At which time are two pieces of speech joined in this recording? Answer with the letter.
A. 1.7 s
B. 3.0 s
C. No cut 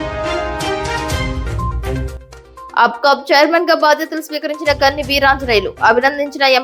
A